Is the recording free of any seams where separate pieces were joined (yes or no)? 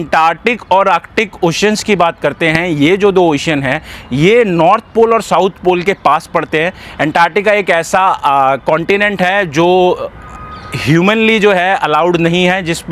yes